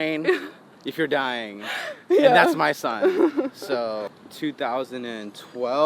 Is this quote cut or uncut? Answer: cut